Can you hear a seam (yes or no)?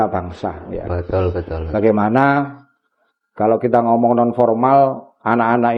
no